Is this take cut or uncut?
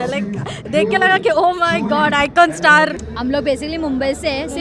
cut